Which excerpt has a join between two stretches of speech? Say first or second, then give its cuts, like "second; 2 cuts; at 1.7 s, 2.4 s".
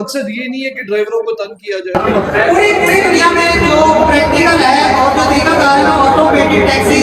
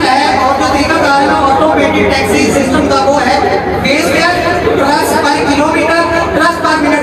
first; 1 cut; at 1.9 s